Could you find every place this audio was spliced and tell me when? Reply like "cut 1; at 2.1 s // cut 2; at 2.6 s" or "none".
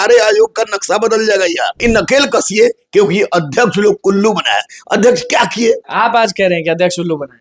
cut 1; at 1.8 s // cut 2; at 5.9 s